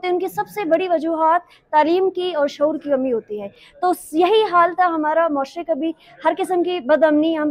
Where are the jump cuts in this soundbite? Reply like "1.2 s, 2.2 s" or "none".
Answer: none